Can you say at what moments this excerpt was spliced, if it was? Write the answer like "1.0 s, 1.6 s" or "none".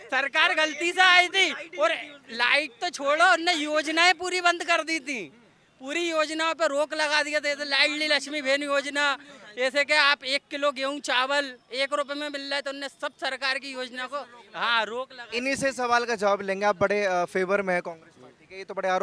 none